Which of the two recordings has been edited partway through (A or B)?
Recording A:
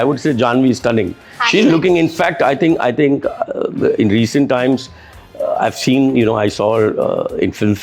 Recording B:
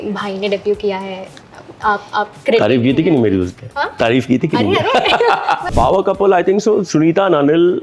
B